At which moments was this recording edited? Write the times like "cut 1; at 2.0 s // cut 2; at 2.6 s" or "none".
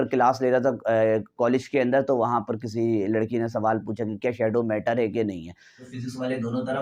cut 1; at 5.9 s